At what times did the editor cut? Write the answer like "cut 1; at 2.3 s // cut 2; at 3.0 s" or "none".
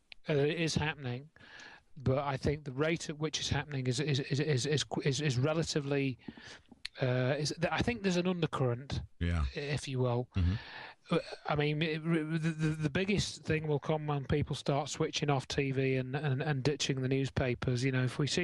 cut 1; at 4.9 s